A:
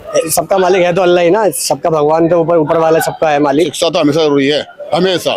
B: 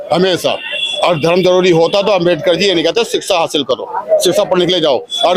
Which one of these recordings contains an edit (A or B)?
A